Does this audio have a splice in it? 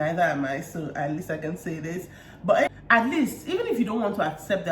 yes; 1 cut; at 2.7 s

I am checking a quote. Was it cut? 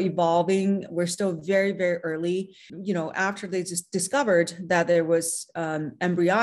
yes; 1 cut; at 2.7 s

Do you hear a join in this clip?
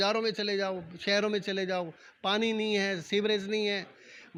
no; 0 cuts

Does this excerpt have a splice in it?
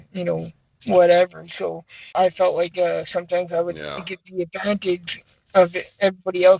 yes; 1 cut; at 2.1 s

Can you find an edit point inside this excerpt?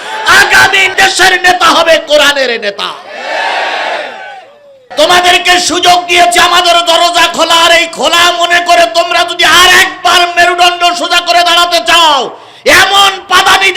yes; 1 cut; at 4.8 s

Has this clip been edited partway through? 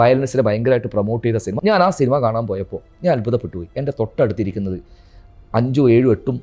yes; 1 cut; at 1.5 s

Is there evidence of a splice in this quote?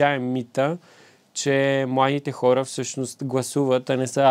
no; 0 cuts

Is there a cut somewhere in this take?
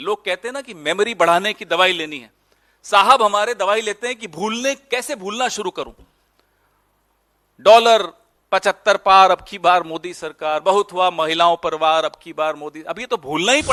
no; 0 cuts

